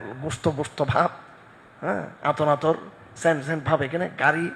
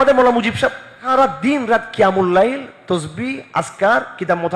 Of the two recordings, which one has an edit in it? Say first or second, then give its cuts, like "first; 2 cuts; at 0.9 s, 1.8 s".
second; 1 cut; at 0.9 s